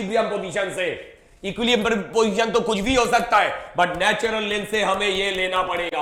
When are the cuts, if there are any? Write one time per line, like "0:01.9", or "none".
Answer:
none